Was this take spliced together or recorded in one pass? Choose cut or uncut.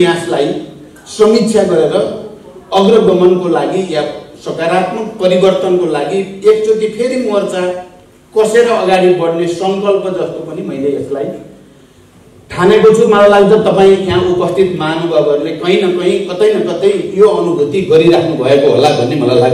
uncut